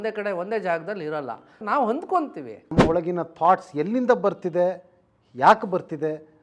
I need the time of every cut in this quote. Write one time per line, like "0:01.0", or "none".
0:01.6
0:02.8